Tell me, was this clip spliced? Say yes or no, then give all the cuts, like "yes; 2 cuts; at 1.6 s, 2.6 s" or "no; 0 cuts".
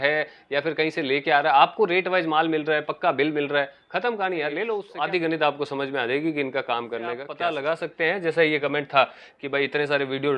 yes; 2 cuts; at 4.9 s, 7.3 s